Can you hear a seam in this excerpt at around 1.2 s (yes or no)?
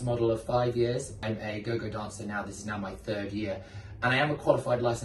yes